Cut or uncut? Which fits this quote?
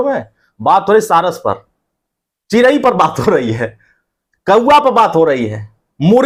uncut